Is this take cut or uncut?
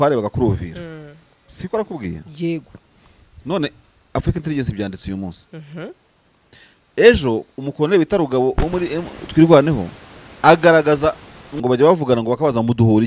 uncut